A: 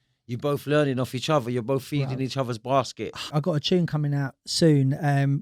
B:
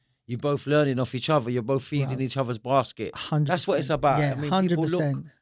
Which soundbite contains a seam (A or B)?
A